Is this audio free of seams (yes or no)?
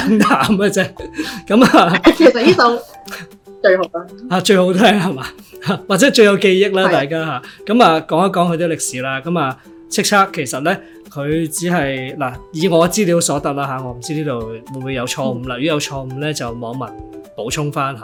yes